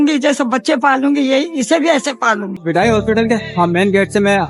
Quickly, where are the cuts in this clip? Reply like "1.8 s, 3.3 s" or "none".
2.6 s